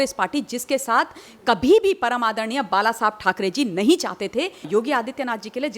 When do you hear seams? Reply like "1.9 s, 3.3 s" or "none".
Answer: 4.7 s